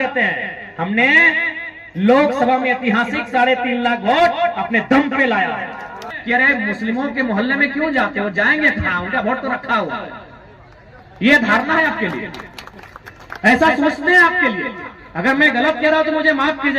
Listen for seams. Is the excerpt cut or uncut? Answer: cut